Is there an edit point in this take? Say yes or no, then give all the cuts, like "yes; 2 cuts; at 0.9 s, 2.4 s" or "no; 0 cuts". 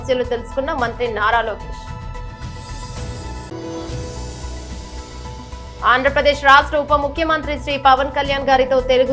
no; 0 cuts